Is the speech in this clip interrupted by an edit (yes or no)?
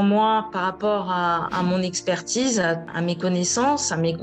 yes